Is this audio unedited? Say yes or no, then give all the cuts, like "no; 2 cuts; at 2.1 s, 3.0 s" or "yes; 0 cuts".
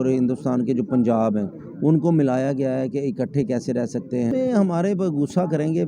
no; 1 cut; at 4.3 s